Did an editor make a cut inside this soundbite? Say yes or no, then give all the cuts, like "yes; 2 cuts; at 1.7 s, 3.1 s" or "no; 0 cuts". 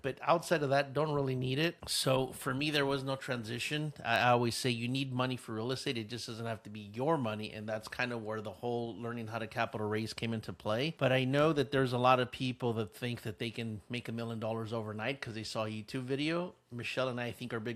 no; 0 cuts